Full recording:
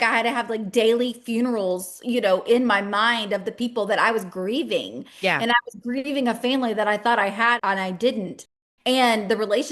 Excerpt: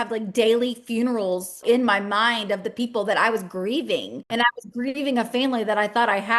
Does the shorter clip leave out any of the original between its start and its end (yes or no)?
yes